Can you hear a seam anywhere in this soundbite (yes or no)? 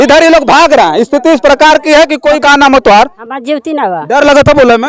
yes